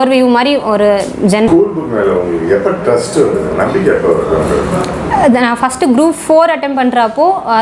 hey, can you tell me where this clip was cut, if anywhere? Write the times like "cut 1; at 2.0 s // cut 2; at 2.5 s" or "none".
cut 1; at 1.5 s